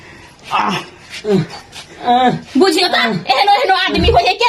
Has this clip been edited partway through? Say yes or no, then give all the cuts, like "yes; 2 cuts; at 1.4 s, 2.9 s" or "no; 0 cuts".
no; 0 cuts